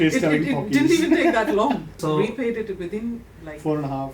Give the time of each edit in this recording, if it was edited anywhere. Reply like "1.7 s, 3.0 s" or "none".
2.0 s